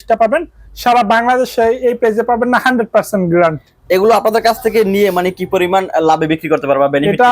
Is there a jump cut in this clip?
no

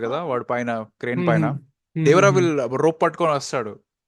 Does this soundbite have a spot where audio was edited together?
no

